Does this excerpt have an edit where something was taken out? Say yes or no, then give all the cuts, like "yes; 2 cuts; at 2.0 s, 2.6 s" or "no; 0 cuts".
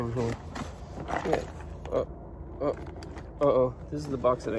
no; 0 cuts